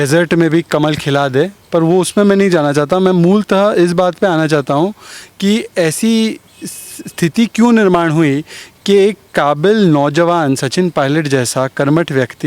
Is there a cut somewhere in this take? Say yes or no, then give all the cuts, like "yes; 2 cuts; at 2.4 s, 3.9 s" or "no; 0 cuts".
no; 0 cuts